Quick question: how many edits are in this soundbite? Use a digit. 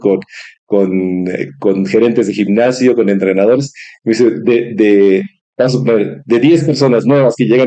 0